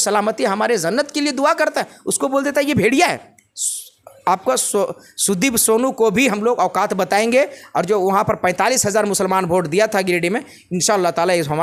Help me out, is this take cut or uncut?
uncut